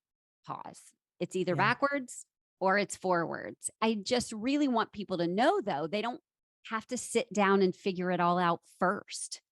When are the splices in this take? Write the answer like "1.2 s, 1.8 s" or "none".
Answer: 3.7 s